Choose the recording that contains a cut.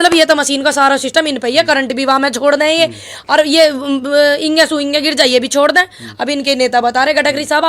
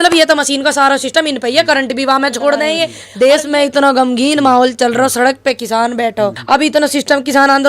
second; 2 cuts; at 3.0 s, 6.4 s

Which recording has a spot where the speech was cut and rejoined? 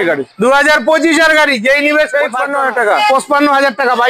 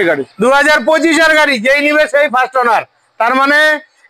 first; 1 cut; at 2.4 s

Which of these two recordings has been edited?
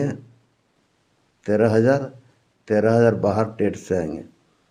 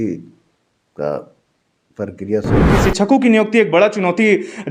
second; 1 cut; at 2.8 s

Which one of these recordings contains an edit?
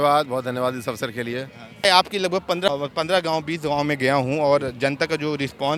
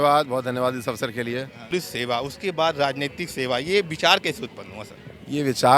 second; 1 cut; at 1.6 s

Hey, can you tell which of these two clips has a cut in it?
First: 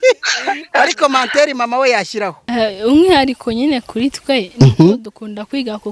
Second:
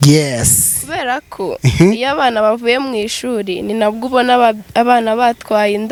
first; 1 cut; at 2.4 s

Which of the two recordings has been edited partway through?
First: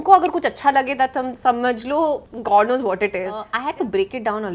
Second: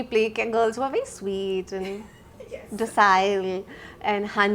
first; 2 cuts; at 2.3 s, 3.5 s

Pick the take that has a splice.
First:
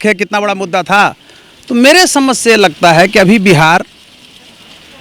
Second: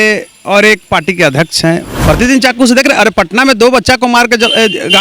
second; 1 cut; at 1.9 s

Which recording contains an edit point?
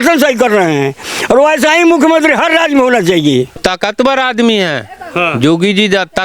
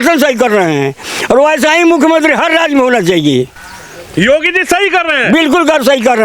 first; 1 cut; at 3.6 s

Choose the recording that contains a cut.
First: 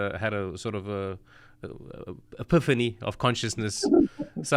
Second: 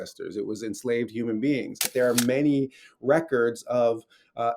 second; 1 cut; at 1.8 s

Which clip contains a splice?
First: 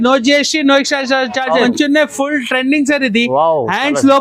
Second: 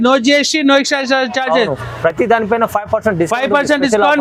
first; 1 cut; at 1.6 s

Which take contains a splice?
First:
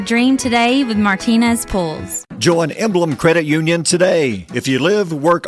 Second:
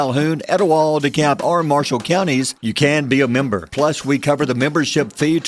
first; 1 cut; at 2.1 s

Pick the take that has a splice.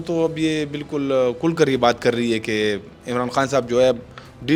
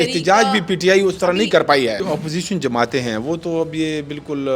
second; 1 cut; at 2.0 s

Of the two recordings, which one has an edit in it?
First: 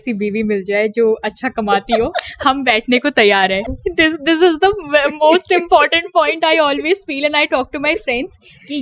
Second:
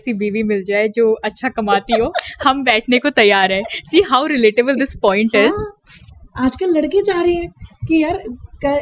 first; 1 cut; at 3.8 s

